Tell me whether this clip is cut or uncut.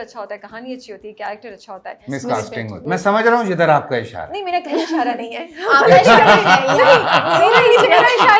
cut